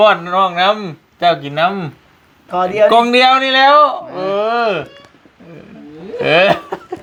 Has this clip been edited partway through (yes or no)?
no